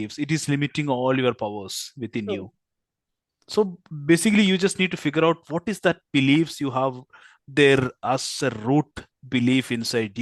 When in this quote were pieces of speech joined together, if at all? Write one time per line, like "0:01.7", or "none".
none